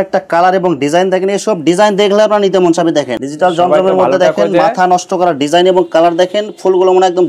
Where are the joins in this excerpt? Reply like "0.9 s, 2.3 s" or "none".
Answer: 3.1 s